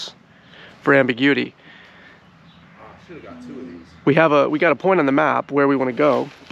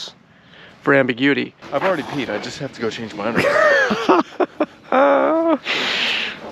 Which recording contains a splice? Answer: second; 1 cut; at 1.6 s

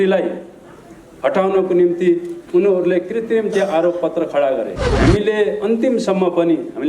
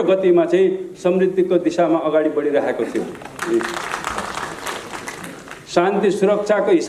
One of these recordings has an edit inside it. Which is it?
first; 1 cut; at 4.8 s

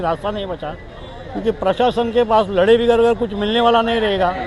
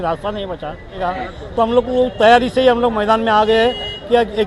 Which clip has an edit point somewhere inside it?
second; 1 cut; at 1.0 s

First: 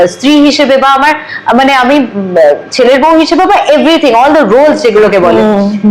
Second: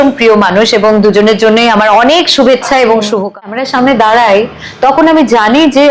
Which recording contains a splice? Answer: second; 1 cut; at 3.4 s

